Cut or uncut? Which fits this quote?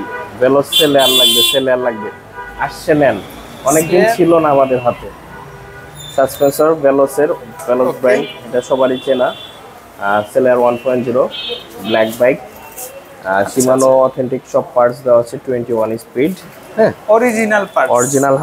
uncut